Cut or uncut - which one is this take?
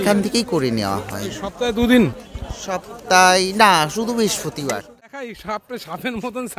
cut